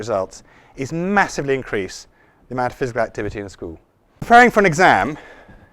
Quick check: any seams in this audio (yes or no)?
yes